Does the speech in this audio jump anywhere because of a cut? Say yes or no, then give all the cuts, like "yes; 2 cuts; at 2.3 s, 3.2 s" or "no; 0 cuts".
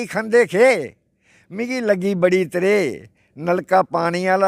no; 0 cuts